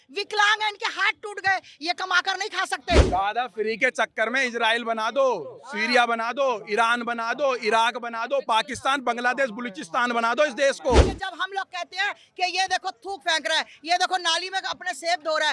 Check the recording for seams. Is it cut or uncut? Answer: cut